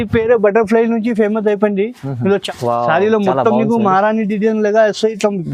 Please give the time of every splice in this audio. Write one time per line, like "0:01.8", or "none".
0:02.4